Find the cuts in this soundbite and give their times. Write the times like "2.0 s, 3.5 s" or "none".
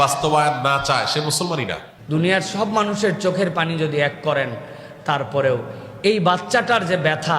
1.9 s